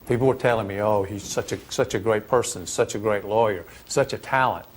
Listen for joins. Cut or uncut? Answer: cut